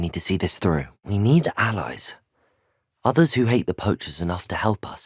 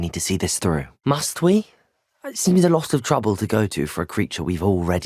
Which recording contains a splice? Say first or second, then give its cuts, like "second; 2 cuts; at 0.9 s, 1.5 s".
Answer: second; 1 cut; at 0.9 s